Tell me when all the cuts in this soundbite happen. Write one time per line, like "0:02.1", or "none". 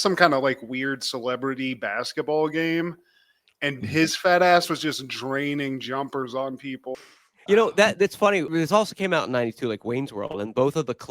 0:06.9